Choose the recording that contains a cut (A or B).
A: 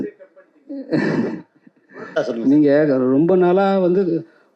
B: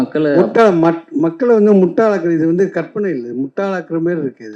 A